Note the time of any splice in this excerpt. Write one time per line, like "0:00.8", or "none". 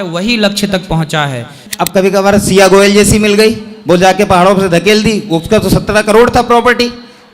0:01.6